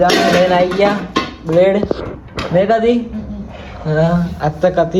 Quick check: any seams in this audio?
no; 0 cuts

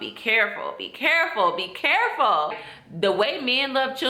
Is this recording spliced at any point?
yes; 1 cut; at 2.5 s

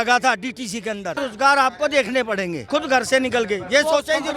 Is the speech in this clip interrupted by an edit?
yes; 2 cuts; at 1.2 s, 2.6 s

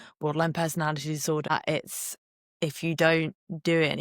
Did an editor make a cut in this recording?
yes; 1 cut; at 1.5 s

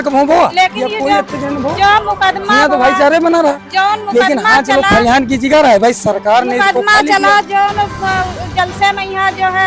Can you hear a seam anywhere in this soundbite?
no; 0 cuts

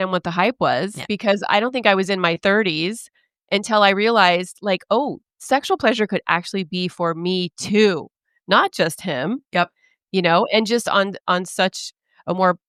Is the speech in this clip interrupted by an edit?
no; 0 cuts

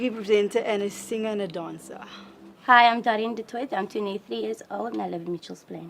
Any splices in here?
no; 0 cuts

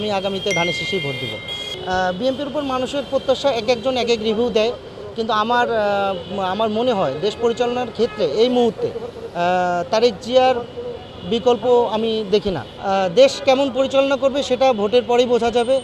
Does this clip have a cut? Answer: no; 0 cuts

